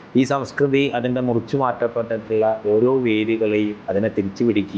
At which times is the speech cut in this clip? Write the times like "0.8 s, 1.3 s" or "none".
3.8 s